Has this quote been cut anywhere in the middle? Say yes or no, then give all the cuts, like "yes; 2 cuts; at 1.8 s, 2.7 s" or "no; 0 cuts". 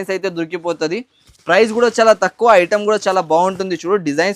no; 0 cuts